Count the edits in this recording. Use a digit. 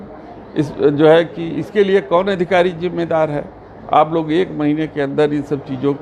0